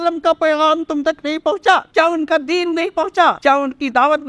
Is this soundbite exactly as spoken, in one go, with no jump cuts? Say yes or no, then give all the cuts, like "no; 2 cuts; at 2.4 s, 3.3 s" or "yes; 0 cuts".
no; 2 cuts; at 1.9 s, 3.4 s